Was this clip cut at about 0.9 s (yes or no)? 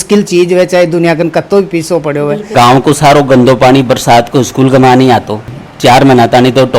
no